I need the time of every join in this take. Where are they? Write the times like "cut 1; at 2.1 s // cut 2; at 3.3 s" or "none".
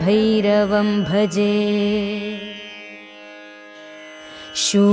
cut 1; at 2.2 s